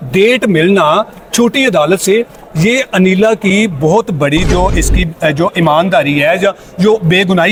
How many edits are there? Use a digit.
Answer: 0